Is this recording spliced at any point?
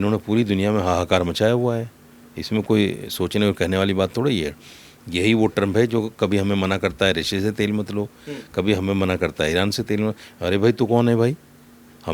no; 0 cuts

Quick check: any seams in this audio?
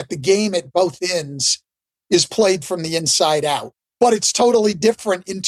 yes; 1 cut; at 3.7 s

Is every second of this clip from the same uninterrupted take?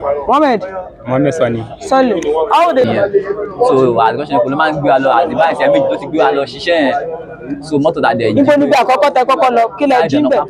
no; 1 cut; at 2.8 s

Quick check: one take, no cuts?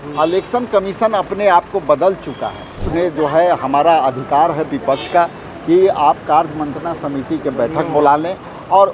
no; 1 cut; at 2.9 s

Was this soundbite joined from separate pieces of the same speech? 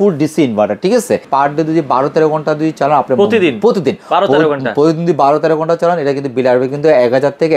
yes; 1 cut; at 1.3 s

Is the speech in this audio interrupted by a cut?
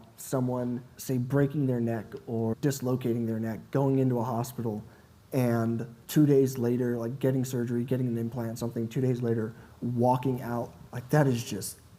yes; 2 cuts; at 0.9 s, 2.5 s

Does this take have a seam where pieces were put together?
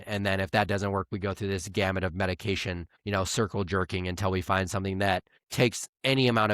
yes; 2 cuts; at 2.9 s, 5.4 s

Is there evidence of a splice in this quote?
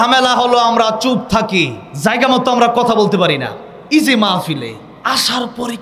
yes; 2 cuts; at 1.8 s, 4.9 s

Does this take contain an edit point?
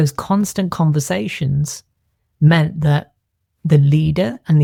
no; 0 cuts

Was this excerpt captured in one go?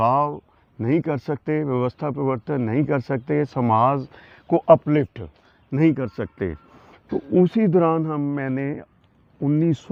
yes; 0 cuts

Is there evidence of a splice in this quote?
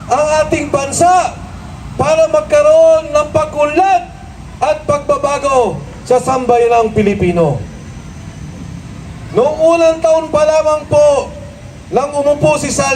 no; 0 cuts

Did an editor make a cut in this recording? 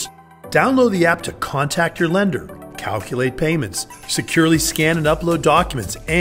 no; 0 cuts

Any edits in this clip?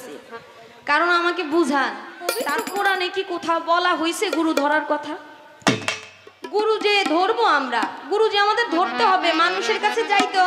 yes; 1 cut; at 2.6 s

